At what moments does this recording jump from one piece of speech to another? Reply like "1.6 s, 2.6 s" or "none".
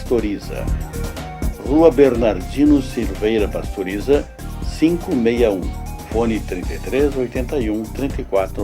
none